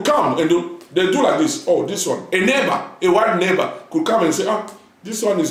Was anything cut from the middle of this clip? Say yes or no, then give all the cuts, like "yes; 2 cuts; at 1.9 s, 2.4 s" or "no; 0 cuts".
no; 0 cuts